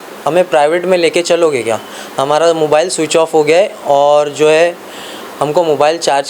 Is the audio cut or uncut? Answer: uncut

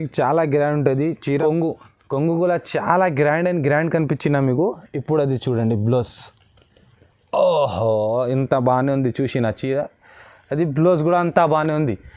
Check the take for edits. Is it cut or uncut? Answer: cut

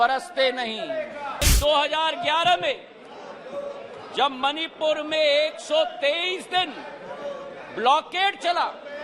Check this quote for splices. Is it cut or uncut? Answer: cut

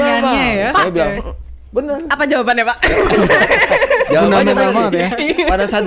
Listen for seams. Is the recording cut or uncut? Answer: uncut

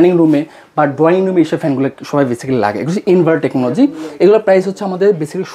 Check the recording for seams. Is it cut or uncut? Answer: uncut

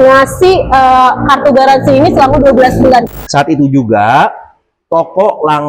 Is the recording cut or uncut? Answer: cut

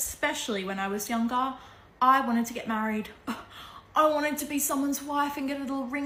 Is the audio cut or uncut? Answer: uncut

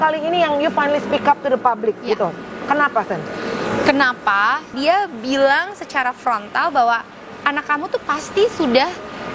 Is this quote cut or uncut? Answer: cut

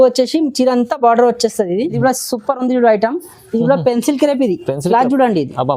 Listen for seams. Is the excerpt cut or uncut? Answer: cut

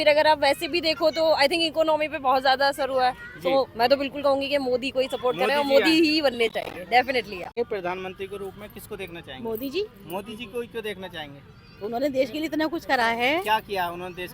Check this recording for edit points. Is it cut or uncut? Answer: cut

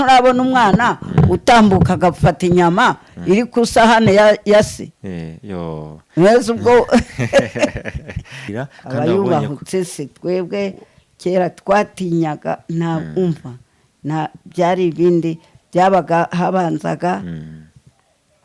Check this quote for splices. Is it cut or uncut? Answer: uncut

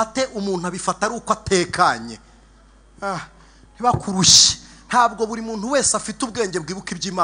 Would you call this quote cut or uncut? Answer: uncut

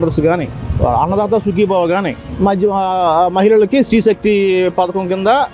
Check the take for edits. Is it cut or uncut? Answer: uncut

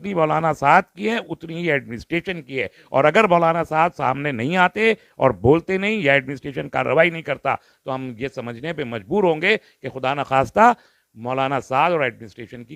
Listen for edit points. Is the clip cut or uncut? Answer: uncut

